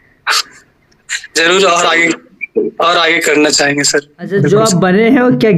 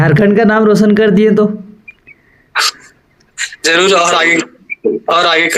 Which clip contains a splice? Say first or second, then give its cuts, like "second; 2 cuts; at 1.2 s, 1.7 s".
first; 1 cut; at 4.4 s